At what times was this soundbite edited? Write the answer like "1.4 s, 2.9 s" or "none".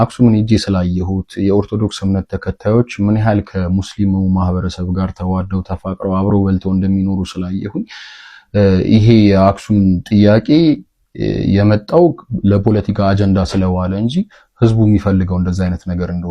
none

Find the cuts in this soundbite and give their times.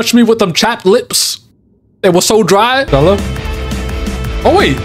2.9 s

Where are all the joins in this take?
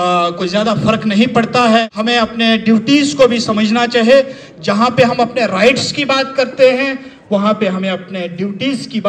1.9 s

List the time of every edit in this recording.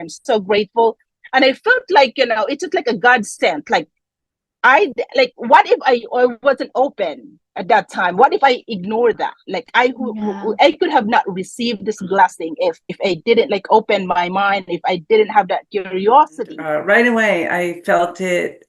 12.9 s, 16.6 s

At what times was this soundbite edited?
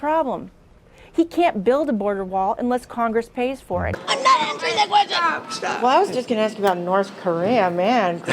4.0 s

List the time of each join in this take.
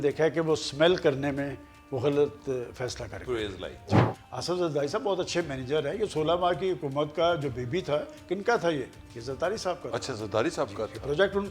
4.1 s

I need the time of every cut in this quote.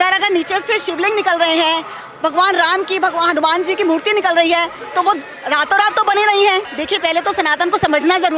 6.7 s

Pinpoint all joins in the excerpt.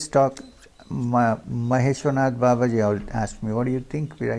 none

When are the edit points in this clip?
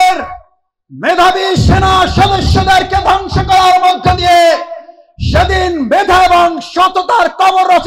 none

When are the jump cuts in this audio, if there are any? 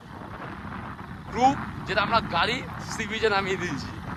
none

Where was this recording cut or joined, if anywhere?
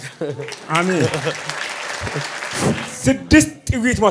2.6 s

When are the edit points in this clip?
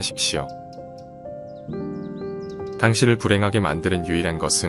none

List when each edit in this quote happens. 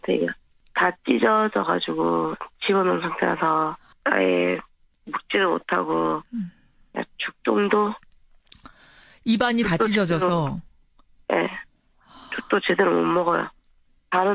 none

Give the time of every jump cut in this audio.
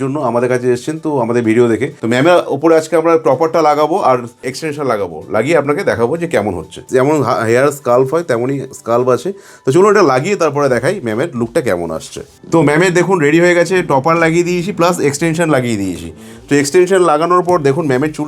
1.9 s, 6.8 s

